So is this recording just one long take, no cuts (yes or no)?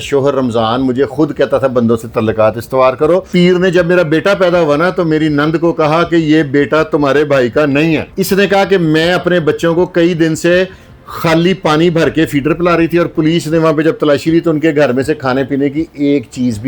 no